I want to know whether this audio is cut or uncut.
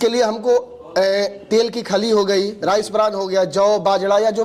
uncut